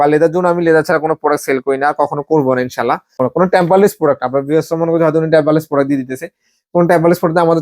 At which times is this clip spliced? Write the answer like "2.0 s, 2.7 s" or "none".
3.2 s